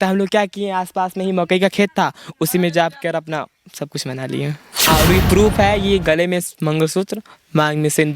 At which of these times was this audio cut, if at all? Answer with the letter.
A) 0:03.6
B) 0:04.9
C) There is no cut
B